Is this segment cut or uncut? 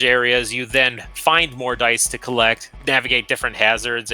cut